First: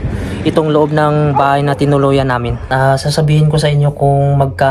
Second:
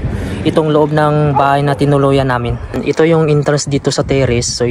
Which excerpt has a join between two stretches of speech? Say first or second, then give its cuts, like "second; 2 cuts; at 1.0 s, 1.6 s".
first; 1 cut; at 2.7 s